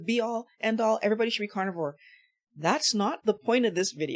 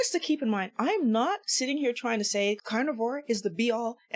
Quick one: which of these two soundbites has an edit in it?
second; 1 cut; at 2.6 s

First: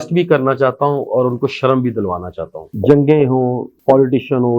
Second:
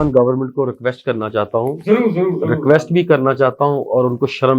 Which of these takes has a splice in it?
first; 1 cut; at 2.7 s

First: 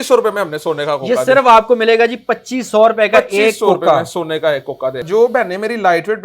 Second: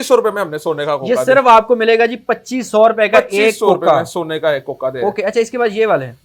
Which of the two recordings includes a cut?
first; 1 cut; at 5.0 s

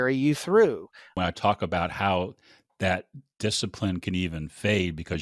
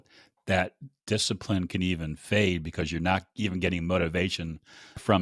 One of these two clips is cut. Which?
first; 1 cut; at 1.1 s

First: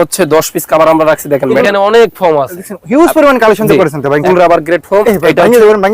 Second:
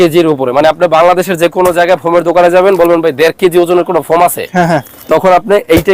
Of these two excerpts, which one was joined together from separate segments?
first; 2 cuts; at 1.6 s, 4.2 s

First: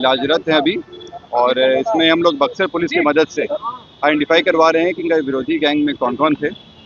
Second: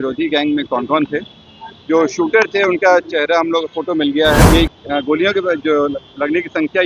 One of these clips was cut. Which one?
second; 1 cut; at 4.5 s

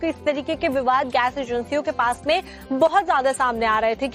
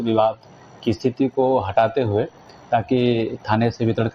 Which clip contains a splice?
first; 1 cut; at 2.9 s

